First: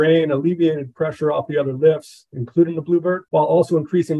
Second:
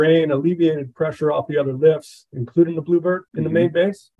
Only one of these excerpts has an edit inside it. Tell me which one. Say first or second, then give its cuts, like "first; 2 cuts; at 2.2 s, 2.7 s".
first; 1 cut; at 3.2 s